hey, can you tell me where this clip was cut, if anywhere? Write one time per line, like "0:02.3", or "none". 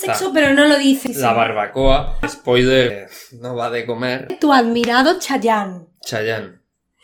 0:01.0
0:02.3
0:02.9
0:04.3